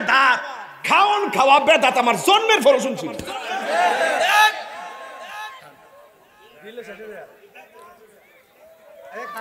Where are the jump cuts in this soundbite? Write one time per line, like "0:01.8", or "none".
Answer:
none